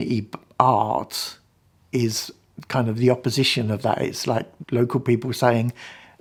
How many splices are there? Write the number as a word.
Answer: zero